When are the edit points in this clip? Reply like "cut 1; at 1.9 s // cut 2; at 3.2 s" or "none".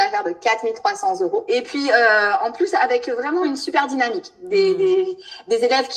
cut 1; at 1.4 s // cut 2; at 3.4 s